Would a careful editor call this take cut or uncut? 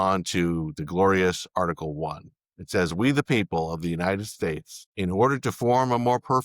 cut